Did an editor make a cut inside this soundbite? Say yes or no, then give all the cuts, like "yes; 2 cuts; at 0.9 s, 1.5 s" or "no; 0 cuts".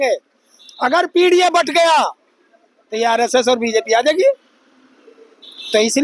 no; 0 cuts